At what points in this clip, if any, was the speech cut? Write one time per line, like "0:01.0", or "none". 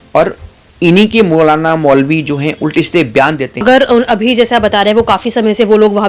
0:03.6